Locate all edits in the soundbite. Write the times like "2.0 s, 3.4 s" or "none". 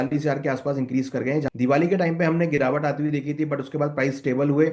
1.5 s

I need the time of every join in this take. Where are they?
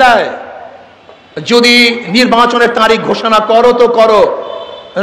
none

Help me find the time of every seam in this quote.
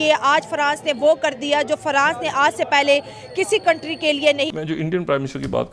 4.6 s

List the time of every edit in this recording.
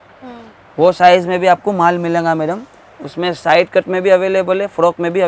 none

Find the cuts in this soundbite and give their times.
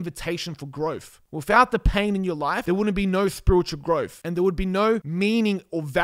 1.1 s, 2.6 s, 4.2 s, 5.1 s

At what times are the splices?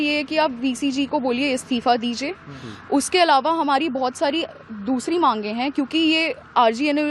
none

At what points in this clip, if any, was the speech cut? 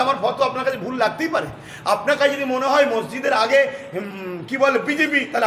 none

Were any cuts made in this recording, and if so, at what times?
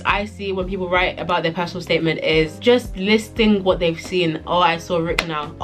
none

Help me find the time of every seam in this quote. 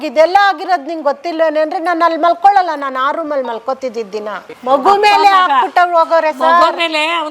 4.5 s

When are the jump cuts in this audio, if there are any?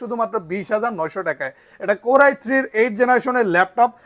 none

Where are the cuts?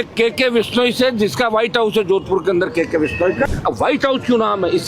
3.5 s

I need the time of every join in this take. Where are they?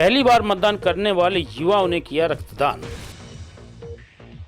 2.8 s

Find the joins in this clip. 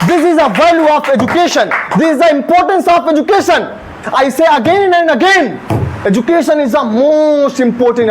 3.9 s

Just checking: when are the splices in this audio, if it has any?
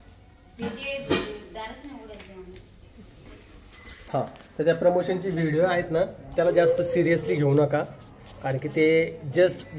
4.1 s

